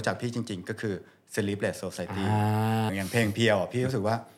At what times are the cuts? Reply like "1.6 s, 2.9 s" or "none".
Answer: 2.9 s